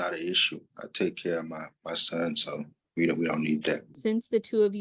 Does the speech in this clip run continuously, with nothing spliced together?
no; 2 cuts; at 2.8 s, 3.9 s

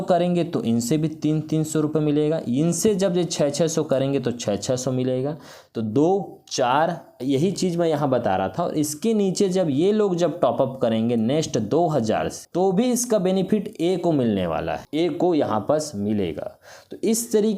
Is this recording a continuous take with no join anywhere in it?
yes; 0 cuts

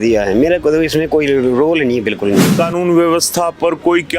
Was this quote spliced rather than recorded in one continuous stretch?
yes; 1 cut; at 2.5 s

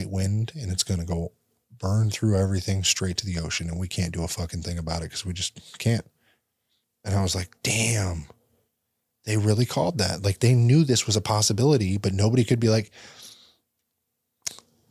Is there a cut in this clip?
no; 0 cuts

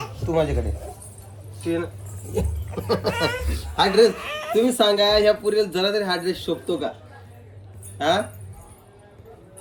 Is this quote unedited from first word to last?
yes; 0 cuts

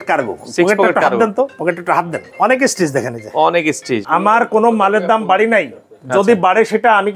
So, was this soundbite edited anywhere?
yes; 2 cuts; at 2.3 s, 4.0 s

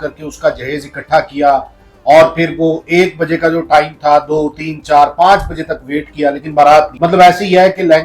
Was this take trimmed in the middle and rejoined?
no; 0 cuts

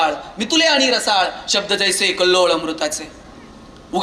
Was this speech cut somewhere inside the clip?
no; 0 cuts

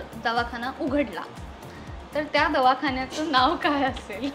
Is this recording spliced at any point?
no; 0 cuts

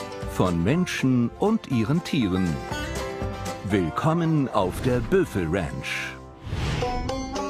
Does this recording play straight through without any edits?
yes; 0 cuts

